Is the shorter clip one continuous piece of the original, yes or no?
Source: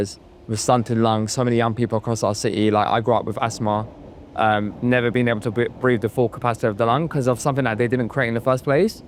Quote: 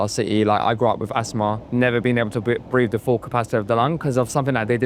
no